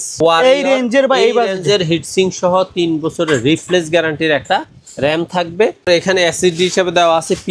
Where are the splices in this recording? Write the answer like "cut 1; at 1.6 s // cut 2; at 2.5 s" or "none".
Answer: cut 1; at 5.9 s